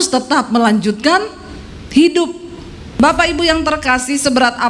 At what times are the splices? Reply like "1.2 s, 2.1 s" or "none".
3.0 s